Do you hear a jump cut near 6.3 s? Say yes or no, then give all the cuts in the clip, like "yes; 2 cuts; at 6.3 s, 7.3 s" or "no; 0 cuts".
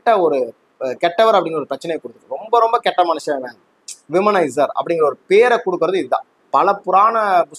yes; 1 cut; at 6.3 s